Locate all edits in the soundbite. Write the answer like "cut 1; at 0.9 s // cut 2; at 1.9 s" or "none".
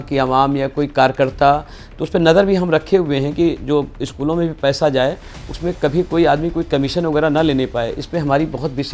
none